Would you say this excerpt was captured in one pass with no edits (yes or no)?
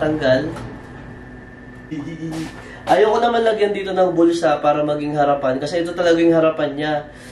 no